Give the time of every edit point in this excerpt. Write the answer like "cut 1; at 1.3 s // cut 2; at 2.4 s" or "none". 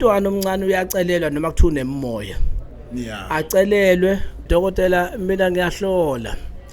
cut 1; at 4.4 s